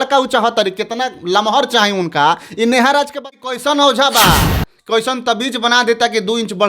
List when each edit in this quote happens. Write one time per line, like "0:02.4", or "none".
0:03.3